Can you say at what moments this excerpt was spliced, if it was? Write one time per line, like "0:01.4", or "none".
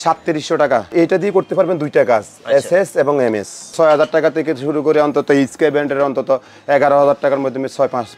0:00.9
0:03.7